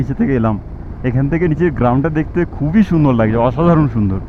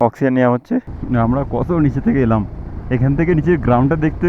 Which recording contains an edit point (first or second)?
second